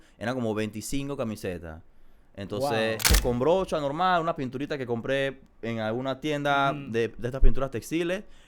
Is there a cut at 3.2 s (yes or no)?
yes